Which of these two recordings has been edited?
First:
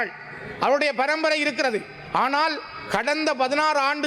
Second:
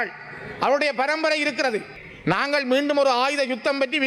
second; 1 cut; at 2.0 s

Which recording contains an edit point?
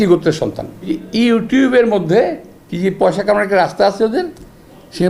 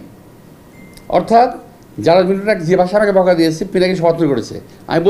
first; 1 cut; at 1.0 s

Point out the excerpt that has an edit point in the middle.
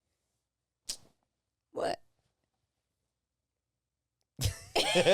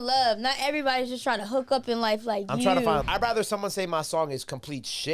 second; 1 cut; at 3.1 s

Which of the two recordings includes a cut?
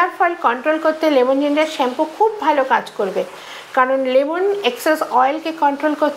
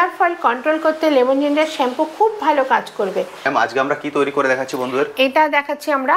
second; 1 cut; at 3.4 s

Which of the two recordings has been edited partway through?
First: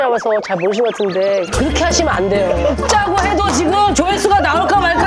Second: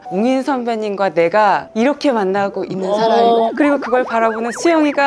second; 2 cuts; at 1.7 s, 3.5 s

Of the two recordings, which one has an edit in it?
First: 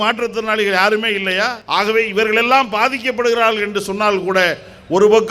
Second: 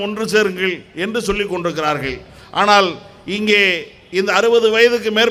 first; 1 cut; at 1.6 s

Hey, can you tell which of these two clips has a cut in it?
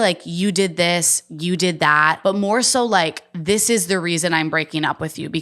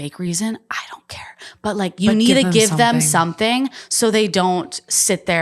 first; 1 cut; at 2.2 s

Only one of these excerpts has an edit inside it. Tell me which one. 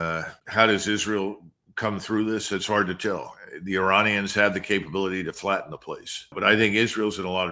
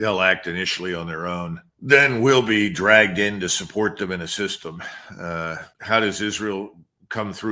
first; 1 cut; at 6.3 s

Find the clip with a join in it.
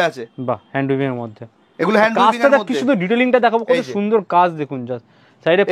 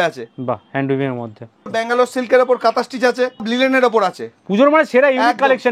second; 2 cuts; at 1.7 s, 3.5 s

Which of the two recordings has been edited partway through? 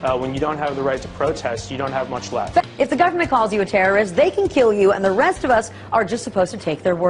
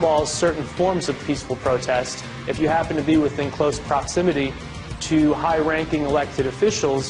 second; 1 cut; at 3.4 s

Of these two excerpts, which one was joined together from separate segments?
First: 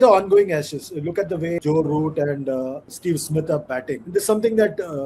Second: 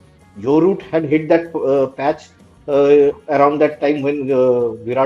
first; 3 cuts; at 1.6 s, 2.9 s, 4.0 s

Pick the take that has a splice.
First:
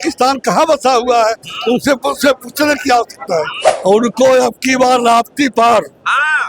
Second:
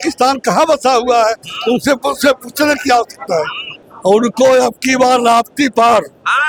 first; 1 cut; at 3.6 s

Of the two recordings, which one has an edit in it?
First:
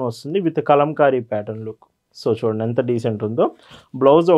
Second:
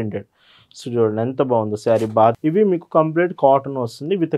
second; 1 cut; at 2.4 s

